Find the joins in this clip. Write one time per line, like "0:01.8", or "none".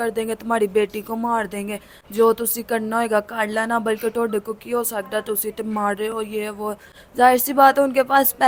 none